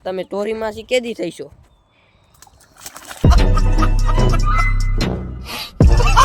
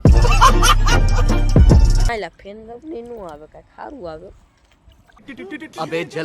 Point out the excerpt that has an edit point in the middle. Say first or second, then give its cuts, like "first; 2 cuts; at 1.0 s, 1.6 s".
second; 1 cut; at 2.1 s